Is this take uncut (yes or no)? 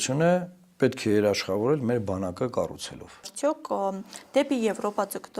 no